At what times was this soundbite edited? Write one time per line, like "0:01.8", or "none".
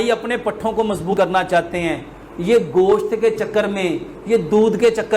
0:01.1